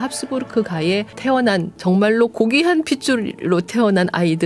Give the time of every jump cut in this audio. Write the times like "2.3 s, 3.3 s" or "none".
1.4 s